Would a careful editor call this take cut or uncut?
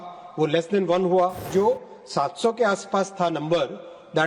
cut